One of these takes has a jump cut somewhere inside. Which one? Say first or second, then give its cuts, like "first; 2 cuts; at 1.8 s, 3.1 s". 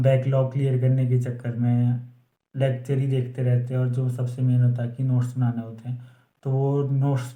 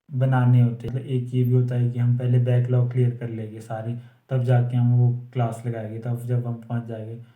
second; 1 cut; at 0.9 s